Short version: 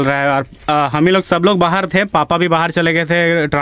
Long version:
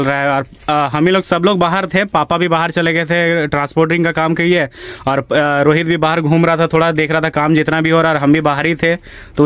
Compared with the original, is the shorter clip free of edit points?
yes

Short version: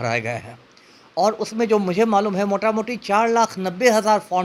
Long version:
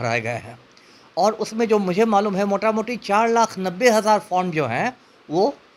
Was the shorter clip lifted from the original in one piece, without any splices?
yes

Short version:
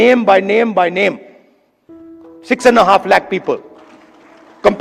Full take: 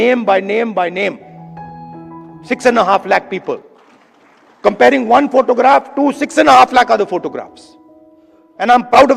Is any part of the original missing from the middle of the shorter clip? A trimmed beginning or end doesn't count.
no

